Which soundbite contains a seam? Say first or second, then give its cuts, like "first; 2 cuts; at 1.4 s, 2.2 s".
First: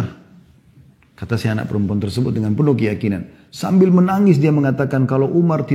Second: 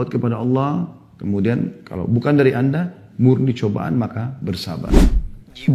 second; 1 cut; at 4.8 s